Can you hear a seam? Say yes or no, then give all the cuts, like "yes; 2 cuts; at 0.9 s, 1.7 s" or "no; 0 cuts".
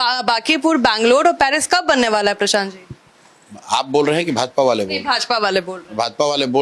no; 0 cuts